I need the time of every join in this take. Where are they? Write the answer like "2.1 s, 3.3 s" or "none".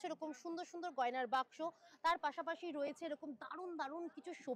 none